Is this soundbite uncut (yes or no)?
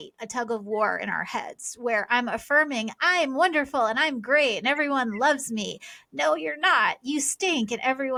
yes